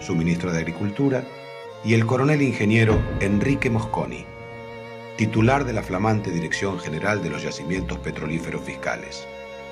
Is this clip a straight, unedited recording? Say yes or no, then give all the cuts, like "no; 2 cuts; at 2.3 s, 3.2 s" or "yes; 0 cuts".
no; 1 cut; at 1.0 s